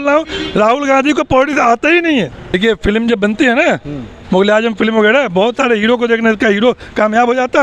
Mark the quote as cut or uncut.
cut